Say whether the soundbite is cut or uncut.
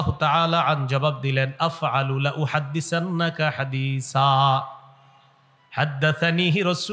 uncut